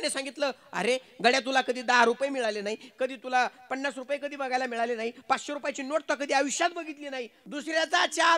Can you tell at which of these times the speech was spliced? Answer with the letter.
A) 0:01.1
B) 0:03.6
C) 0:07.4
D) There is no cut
C